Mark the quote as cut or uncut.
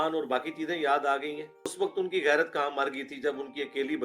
cut